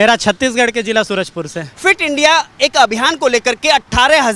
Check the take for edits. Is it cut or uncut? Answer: cut